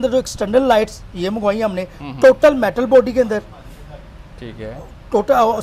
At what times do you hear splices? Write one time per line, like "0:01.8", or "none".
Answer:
none